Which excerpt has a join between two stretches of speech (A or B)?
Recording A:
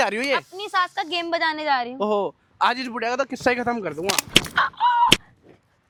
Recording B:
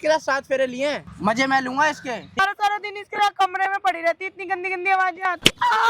B